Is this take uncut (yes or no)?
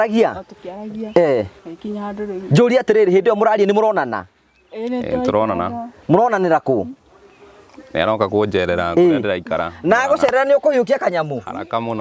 yes